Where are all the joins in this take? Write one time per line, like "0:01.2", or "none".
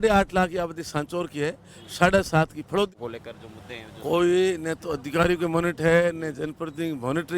0:02.9

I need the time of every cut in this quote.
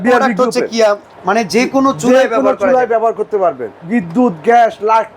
0:01.1
0:03.7

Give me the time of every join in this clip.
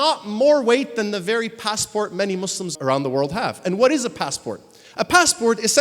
0:02.7

